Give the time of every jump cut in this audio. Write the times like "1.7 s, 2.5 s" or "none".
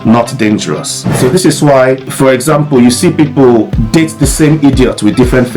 1.1 s, 2.1 s, 3.8 s